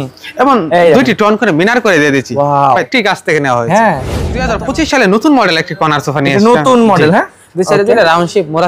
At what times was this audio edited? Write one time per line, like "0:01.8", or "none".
0:02.7
0:04.4